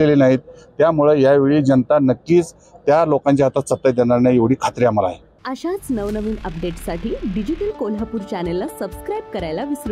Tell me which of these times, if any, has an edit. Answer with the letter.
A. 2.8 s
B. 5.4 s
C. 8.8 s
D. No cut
D